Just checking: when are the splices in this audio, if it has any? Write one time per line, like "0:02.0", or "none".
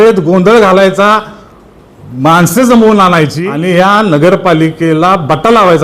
0:03.5